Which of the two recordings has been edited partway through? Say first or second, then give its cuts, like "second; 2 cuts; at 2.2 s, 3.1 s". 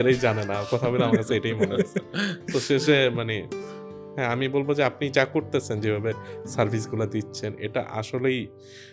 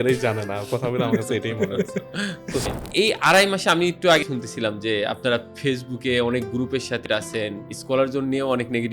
second; 3 cuts; at 2.7 s, 4.2 s, 7.0 s